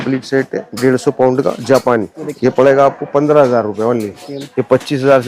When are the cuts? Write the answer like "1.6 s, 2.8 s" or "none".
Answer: 2.2 s, 4.2 s